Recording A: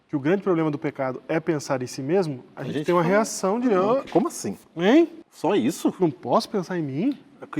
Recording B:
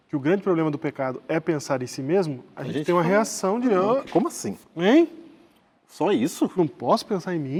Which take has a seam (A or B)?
A